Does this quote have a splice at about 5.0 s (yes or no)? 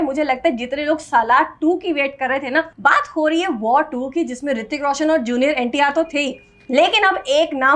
no